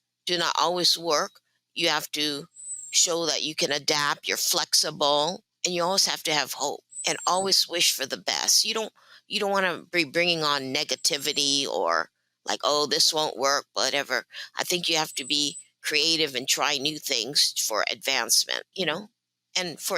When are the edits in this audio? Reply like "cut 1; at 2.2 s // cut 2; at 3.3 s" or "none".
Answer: cut 1; at 5.5 s // cut 2; at 6.9 s // cut 3; at 18.7 s